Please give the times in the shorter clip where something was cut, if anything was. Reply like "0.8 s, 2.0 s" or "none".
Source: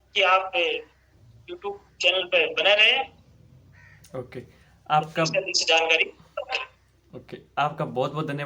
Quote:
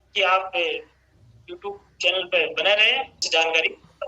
3.2 s